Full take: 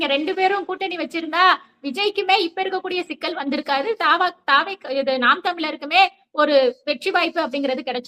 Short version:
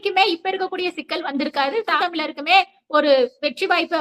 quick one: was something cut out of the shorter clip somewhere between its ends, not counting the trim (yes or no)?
yes